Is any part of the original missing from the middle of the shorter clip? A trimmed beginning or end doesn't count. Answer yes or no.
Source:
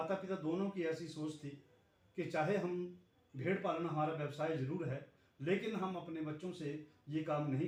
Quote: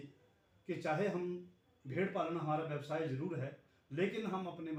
no